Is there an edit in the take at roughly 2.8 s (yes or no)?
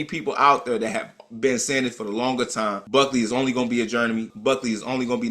yes